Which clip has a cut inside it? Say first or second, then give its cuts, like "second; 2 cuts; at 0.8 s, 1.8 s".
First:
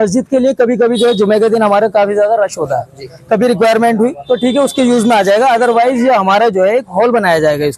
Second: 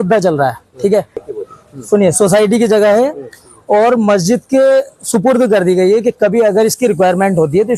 second; 1 cut; at 1.2 s